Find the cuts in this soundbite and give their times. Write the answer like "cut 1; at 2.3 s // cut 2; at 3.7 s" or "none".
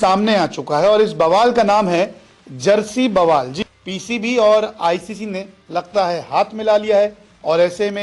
cut 1; at 3.5 s